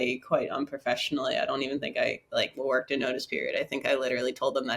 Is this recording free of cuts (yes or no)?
yes